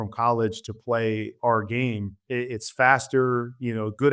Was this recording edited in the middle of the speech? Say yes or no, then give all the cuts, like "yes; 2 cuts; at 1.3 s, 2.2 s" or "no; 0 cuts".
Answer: yes; 1 cut; at 2.2 s